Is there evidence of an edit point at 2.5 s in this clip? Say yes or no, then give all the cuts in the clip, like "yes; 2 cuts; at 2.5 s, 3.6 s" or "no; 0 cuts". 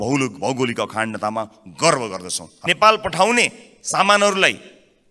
yes; 1 cut; at 2.5 s